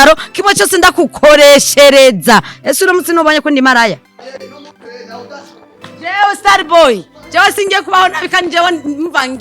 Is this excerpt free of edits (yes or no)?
no